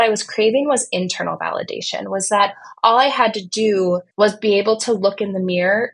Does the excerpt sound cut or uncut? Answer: cut